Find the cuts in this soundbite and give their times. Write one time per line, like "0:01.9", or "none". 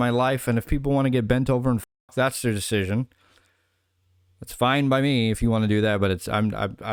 none